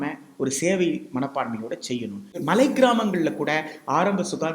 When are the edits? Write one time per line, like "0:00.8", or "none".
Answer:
0:02.4